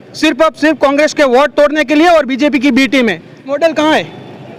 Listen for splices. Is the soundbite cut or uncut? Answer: cut